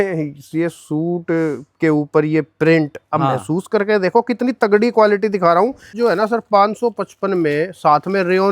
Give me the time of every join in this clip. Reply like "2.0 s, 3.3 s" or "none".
5.9 s